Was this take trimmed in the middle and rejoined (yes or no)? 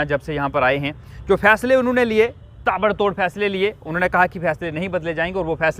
no